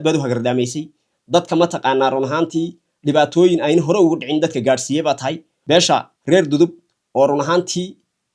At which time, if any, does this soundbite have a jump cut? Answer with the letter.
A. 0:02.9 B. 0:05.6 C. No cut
B